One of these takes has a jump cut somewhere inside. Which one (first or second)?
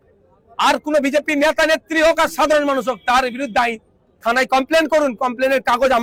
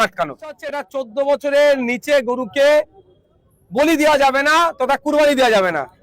second